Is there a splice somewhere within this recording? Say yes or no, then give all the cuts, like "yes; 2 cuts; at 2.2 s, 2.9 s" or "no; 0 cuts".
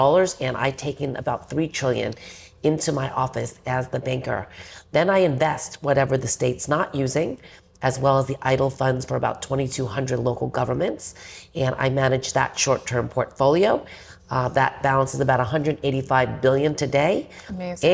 no; 0 cuts